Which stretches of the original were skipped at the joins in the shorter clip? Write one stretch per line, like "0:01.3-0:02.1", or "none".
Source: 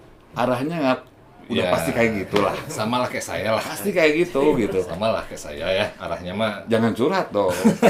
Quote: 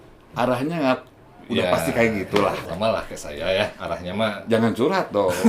0:02.7-0:04.9

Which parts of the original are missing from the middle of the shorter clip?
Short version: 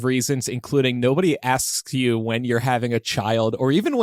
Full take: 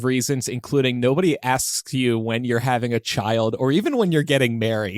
none

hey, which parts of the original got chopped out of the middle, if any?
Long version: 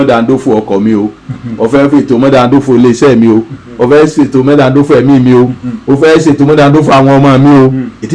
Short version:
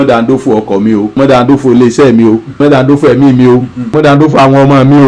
0:01.2-0:02.2
0:03.6-0:04.4
0:05.8-0:06.5

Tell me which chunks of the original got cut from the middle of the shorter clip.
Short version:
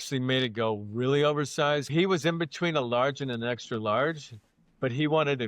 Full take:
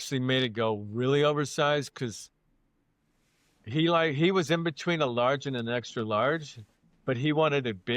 0:01.9-0:04.1

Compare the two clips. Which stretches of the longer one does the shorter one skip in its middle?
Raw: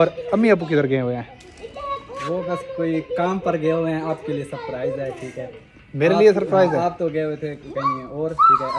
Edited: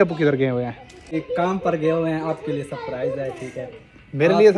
0:01.6-0:02.9

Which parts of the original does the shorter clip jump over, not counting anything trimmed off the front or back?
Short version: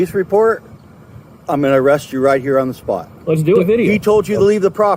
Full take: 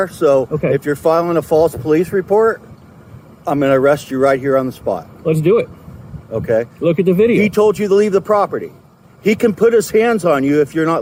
0:05.6-0:07.1

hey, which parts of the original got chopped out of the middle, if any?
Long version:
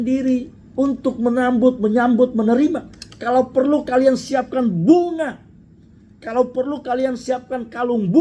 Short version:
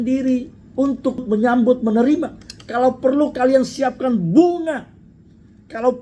0:01.2-0:01.7

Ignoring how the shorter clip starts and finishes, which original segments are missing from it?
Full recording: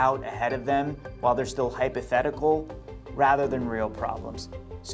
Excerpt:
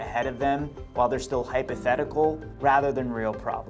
0:02.7-0:03.0

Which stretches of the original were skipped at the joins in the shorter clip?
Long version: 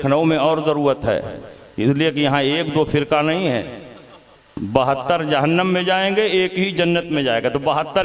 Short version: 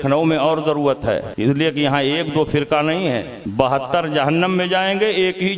0:01.3-0:01.7
0:03.8-0:04.5

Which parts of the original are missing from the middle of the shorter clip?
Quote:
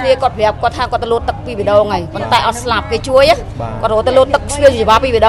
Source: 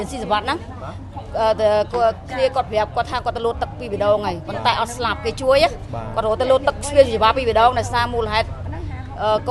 none

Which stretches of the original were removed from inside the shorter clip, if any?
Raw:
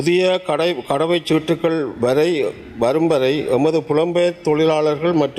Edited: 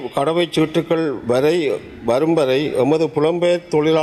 none

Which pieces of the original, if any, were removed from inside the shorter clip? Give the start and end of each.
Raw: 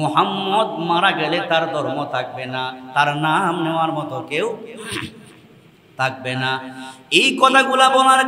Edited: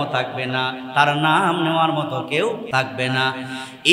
0:04.6-0:05.9

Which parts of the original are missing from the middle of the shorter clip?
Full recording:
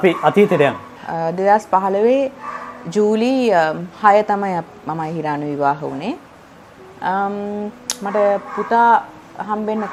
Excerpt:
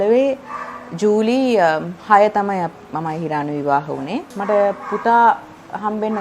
0:06.3-0:08.0

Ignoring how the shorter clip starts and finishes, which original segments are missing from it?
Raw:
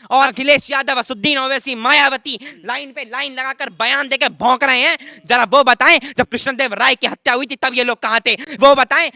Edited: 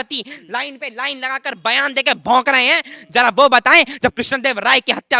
none

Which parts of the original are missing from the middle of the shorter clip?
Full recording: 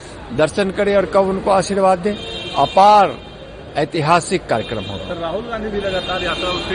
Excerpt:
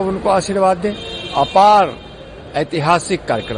none

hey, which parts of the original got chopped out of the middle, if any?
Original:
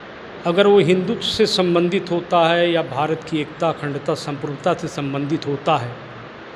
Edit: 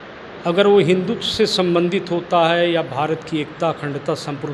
none

